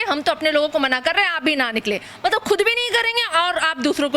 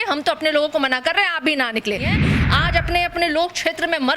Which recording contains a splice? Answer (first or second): second